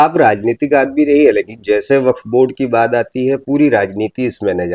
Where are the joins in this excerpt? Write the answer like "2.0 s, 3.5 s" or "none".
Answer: none